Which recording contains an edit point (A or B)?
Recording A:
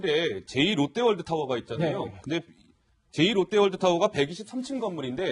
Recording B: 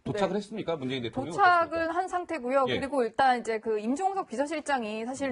A